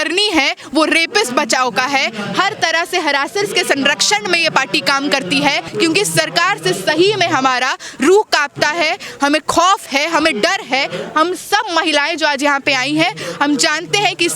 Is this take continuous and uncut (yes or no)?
no